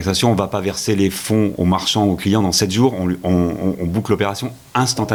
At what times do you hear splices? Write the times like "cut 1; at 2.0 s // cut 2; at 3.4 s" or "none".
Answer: none